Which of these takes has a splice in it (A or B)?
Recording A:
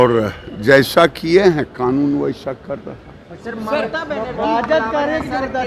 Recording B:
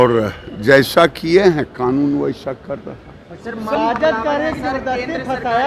B